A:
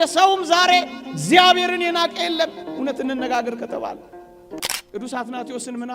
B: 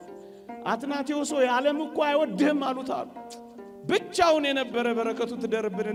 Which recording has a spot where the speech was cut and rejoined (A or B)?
A